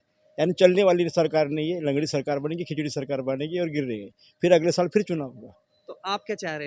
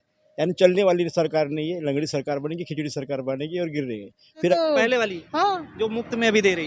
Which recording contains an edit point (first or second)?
second